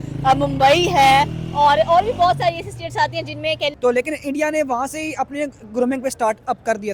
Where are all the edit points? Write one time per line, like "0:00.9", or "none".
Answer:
0:03.8